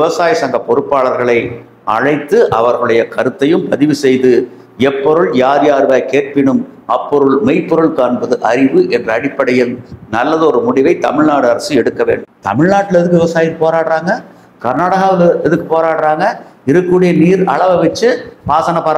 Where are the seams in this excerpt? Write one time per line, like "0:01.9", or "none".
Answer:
0:12.3